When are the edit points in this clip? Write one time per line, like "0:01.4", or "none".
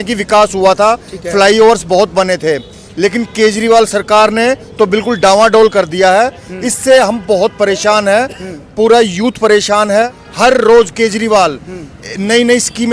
0:10.2